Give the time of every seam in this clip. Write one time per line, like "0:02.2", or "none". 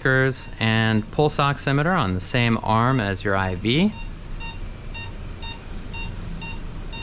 0:04.1